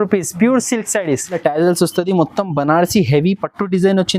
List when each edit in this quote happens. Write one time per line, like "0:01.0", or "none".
0:01.4

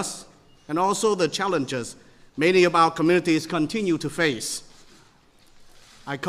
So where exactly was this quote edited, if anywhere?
0:04.8

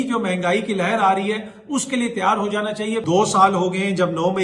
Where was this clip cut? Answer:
0:03.0

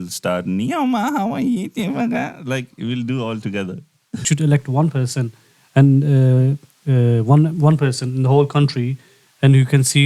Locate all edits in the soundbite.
0:04.2

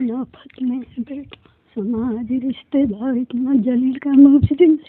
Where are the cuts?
0:01.6

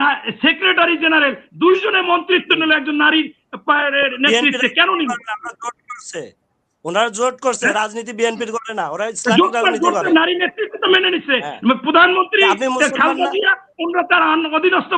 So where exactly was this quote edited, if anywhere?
none

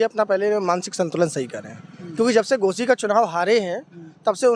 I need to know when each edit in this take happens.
none

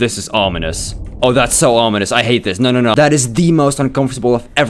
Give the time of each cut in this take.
0:02.9

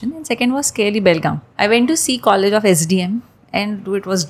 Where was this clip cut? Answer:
0:01.4

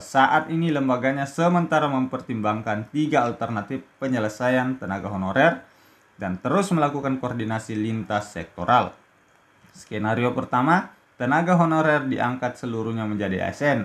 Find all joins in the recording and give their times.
none

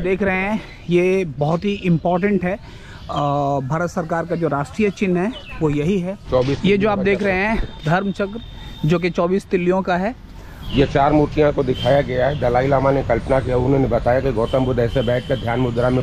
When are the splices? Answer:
0:06.2
0:10.6

